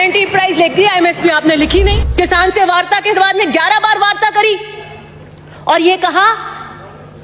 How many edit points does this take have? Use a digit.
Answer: 1